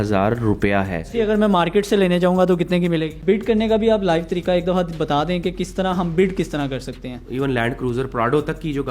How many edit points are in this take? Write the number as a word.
three